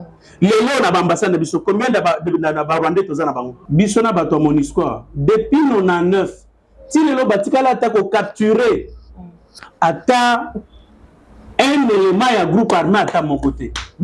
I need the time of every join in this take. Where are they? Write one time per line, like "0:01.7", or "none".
0:03.6